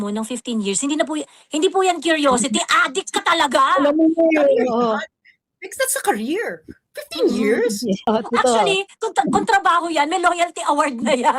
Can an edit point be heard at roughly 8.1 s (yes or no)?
yes